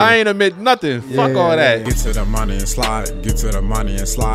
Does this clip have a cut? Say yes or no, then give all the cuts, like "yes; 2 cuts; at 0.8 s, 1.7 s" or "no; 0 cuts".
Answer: yes; 1 cut; at 1.8 s